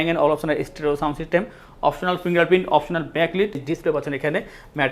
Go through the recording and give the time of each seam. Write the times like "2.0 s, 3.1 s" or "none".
3.6 s